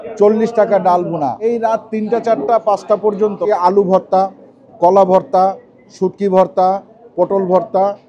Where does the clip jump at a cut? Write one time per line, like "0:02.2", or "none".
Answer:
0:01.4
0:03.5

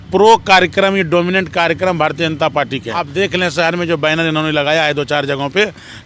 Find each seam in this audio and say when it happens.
0:02.9

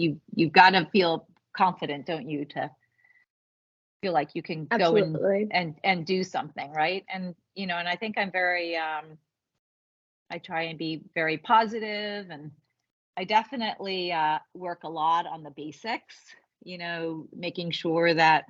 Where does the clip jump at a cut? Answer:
none

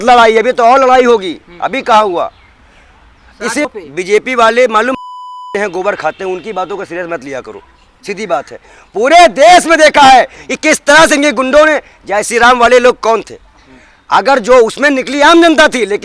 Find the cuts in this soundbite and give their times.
0:03.6

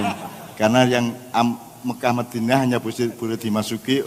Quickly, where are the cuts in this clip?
none

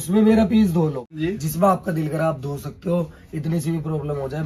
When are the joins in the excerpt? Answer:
0:01.2

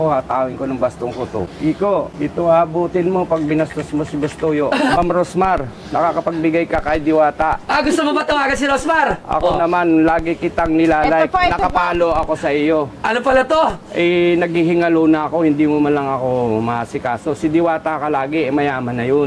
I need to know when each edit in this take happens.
0:01.4
0:02.1
0:05.0

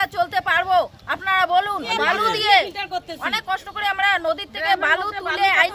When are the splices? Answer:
0:01.9

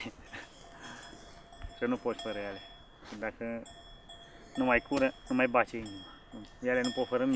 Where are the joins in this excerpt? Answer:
none

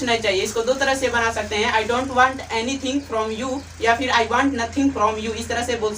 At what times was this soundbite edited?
none

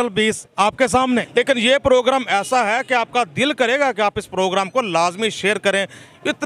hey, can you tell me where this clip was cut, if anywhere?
0:01.3

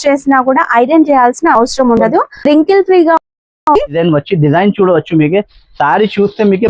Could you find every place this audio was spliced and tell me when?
0:04.0

